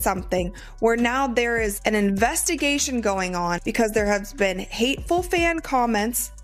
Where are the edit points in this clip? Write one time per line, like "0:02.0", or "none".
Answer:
0:03.6